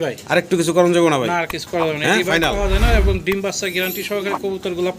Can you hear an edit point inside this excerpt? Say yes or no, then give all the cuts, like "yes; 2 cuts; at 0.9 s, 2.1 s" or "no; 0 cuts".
no; 0 cuts